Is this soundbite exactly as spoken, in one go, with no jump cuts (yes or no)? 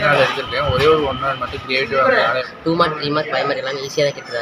no